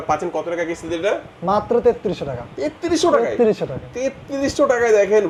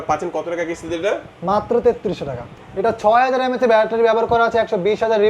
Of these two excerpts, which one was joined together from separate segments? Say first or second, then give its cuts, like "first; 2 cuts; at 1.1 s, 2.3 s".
second; 1 cut; at 2.6 s